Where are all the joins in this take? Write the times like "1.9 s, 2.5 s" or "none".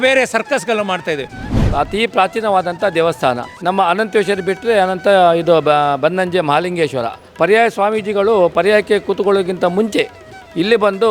1.4 s, 3.5 s, 7.2 s